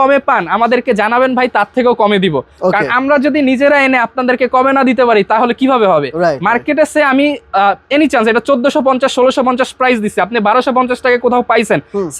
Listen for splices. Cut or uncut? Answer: uncut